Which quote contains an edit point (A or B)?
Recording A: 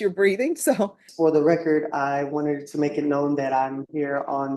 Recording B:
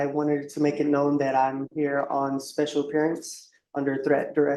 A